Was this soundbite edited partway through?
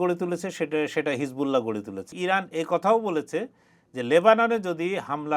yes; 1 cut; at 2.1 s

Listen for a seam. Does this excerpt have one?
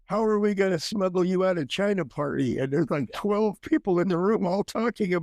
no; 0 cuts

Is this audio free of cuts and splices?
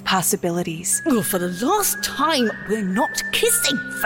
no; 1 cut; at 1.0 s

